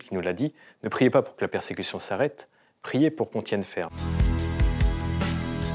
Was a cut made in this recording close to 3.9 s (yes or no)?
yes